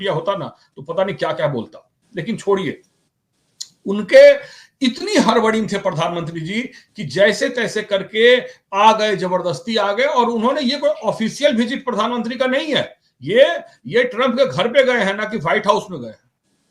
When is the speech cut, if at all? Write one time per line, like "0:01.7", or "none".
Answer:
none